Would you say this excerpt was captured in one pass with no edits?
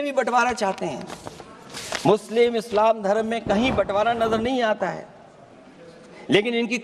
yes; 0 cuts

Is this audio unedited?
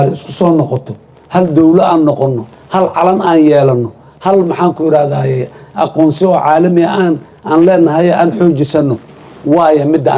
yes; 0 cuts

